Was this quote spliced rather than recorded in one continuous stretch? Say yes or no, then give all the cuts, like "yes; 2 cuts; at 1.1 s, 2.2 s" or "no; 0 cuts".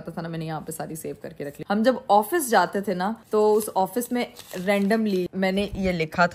yes; 2 cuts; at 1.6 s, 5.3 s